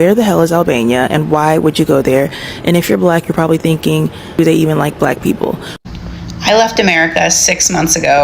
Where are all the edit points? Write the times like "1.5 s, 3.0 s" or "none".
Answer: 5.7 s